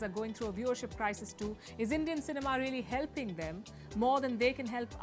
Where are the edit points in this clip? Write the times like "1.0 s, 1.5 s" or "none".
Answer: none